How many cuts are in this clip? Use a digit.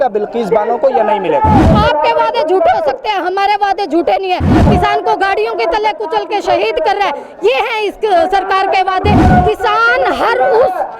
3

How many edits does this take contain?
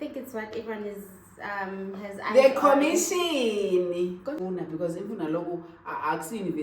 1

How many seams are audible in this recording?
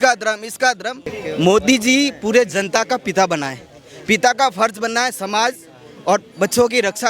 1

